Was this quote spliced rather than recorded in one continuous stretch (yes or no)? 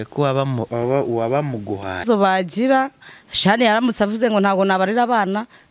yes